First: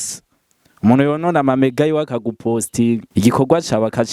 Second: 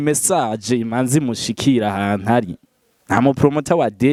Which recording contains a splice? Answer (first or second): first